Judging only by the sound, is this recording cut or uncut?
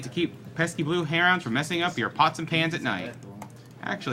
cut